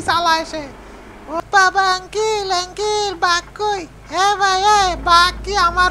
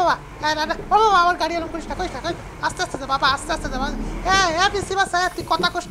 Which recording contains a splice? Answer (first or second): first